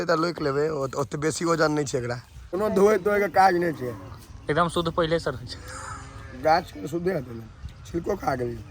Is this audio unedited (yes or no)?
no